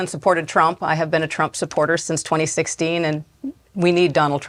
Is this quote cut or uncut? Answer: uncut